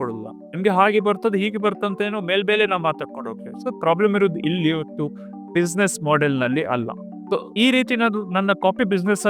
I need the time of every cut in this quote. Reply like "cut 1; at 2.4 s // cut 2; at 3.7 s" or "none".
cut 1; at 7.1 s